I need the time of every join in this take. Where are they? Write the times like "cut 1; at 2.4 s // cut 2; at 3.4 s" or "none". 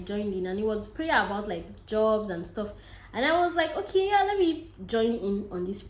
none